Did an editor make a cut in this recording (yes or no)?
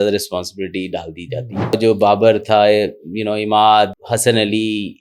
yes